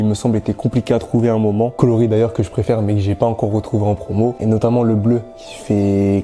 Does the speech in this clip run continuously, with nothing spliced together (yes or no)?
no